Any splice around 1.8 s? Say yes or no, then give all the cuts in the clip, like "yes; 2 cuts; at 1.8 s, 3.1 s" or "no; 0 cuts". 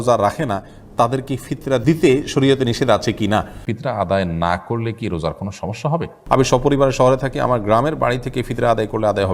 yes; 3 cuts; at 1.8 s, 3.7 s, 6.1 s